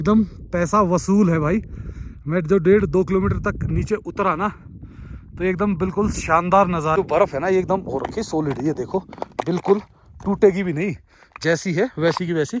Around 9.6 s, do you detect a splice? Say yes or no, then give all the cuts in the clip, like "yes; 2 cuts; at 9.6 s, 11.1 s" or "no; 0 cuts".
no; 1 cut; at 6.9 s